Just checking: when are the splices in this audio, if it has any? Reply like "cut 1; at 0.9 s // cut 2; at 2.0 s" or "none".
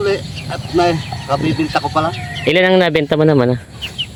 none